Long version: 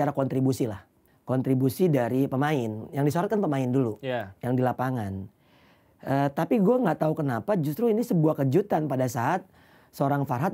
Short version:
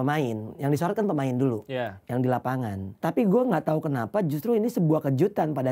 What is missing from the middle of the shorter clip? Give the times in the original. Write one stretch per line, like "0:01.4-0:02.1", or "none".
0:05.3-0:06.3